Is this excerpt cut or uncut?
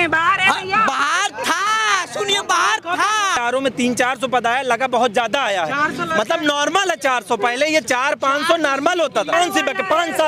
cut